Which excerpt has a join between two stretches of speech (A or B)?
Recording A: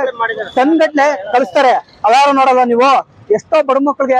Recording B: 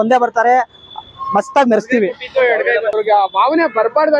B